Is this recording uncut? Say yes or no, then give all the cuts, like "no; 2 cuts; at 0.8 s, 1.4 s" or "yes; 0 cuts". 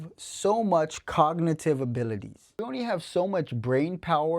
no; 1 cut; at 2.7 s